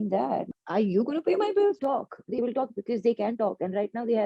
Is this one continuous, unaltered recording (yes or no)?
no